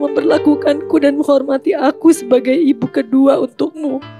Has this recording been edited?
no; 0 cuts

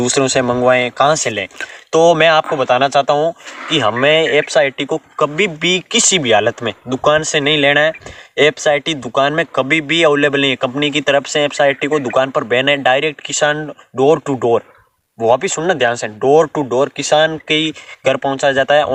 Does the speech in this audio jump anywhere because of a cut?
no; 0 cuts

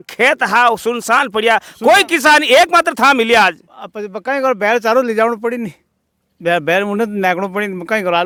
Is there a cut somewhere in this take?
no; 0 cuts

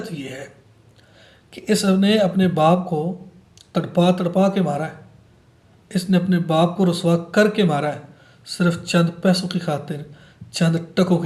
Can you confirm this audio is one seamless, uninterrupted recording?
yes; 0 cuts

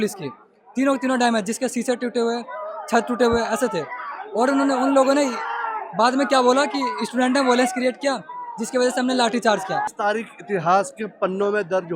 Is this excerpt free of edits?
no; 1 cut; at 9.9 s

